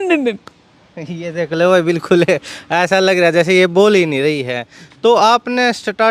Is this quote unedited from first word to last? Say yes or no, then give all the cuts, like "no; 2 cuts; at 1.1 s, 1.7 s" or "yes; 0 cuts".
yes; 0 cuts